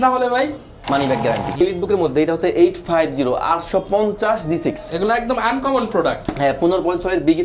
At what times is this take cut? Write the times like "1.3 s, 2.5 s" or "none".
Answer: 1.6 s

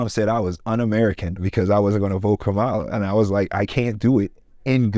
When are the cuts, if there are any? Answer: 1.4 s

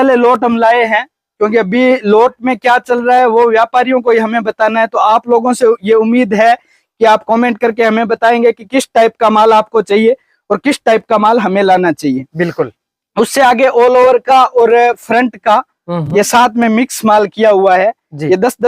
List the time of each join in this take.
none

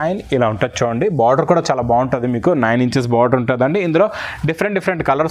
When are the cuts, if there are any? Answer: none

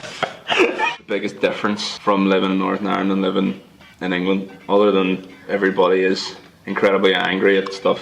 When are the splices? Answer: 1.0 s, 1.9 s, 5.5 s

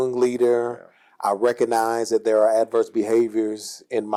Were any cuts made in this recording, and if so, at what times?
none

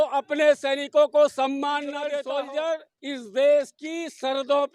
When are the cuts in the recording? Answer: 2.1 s

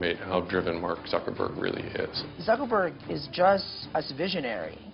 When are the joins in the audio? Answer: 2.2 s, 3.8 s

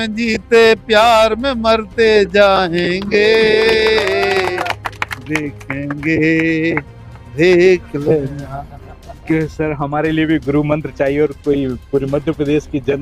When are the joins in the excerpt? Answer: 9.2 s

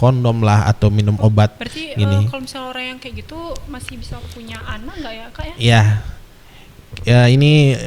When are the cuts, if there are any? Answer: none

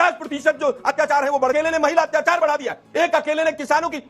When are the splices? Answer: 1.5 s

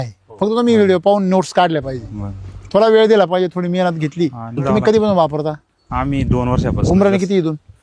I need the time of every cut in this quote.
none

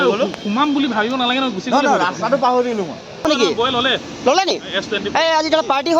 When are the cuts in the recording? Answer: 3.3 s

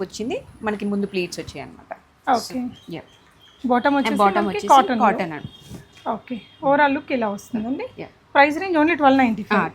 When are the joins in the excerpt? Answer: none

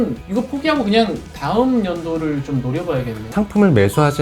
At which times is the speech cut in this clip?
3.2 s

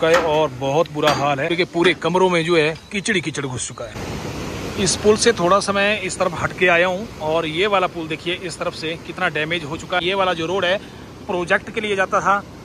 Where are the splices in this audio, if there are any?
1.5 s, 3.9 s, 10.0 s

